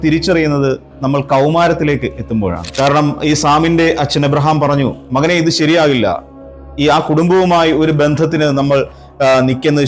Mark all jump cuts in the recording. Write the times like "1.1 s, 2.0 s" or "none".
2.6 s